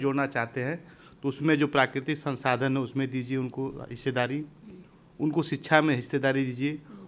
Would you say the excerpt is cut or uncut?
uncut